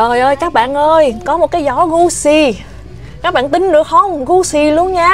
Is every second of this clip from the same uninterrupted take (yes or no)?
yes